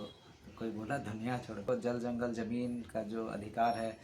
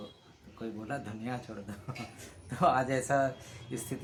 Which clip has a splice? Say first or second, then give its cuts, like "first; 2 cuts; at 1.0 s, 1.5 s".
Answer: first; 1 cut; at 1.6 s